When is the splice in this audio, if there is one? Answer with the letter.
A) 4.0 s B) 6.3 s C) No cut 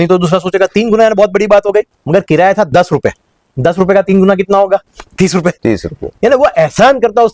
C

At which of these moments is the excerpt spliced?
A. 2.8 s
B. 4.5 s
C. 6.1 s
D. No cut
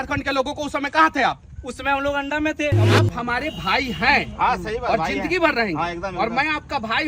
A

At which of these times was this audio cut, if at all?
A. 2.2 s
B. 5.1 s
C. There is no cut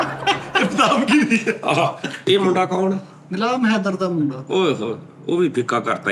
A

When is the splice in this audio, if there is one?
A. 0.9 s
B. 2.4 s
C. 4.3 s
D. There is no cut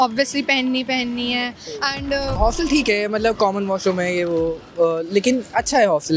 B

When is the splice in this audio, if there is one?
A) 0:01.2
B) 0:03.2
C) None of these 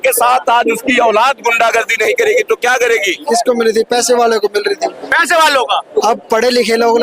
B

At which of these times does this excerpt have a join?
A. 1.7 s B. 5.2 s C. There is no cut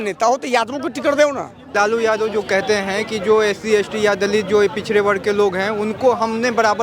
A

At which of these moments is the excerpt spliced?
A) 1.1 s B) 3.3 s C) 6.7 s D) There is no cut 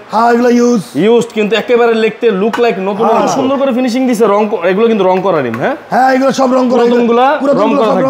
B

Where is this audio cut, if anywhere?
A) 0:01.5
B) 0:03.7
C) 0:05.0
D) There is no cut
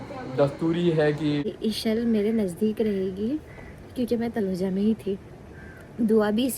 A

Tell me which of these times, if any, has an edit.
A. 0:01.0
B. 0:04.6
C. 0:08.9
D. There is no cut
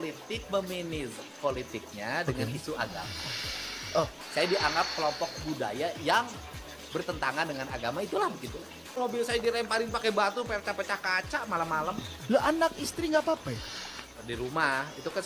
C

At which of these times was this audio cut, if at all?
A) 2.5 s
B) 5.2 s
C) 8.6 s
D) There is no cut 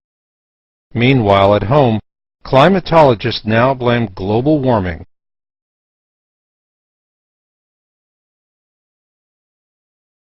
D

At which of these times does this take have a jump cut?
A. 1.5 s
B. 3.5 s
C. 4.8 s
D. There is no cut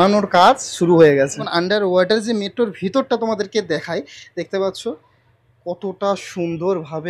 A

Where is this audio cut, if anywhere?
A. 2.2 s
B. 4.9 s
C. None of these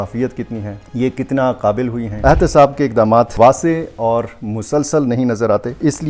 A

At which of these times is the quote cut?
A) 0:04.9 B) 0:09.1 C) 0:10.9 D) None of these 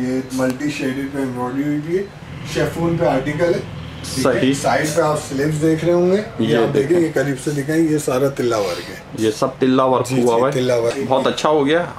C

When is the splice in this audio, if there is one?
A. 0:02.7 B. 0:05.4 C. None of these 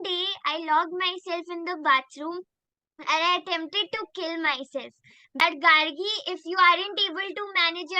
B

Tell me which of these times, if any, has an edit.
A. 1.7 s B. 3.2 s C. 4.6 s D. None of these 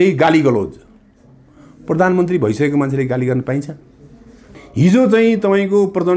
C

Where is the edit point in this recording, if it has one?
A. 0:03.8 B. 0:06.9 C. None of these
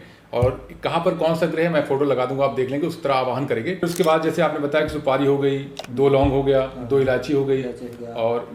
A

